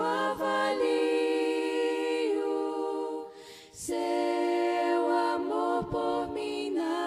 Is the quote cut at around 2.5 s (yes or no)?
no